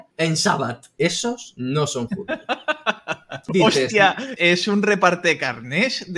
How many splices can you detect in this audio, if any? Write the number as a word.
three